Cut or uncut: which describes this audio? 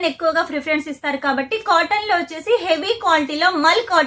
uncut